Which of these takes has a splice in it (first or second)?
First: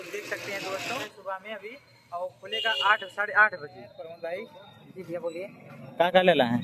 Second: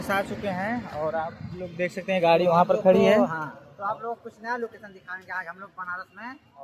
first